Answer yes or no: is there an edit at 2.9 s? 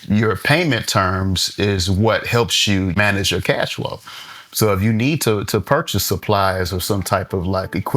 yes